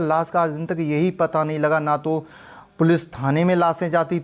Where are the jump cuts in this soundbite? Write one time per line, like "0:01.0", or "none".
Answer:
none